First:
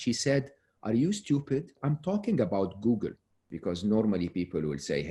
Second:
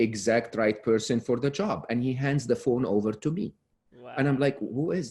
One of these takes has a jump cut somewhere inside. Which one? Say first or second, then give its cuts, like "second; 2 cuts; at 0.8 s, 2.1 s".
first; 2 cuts; at 1.8 s, 3.4 s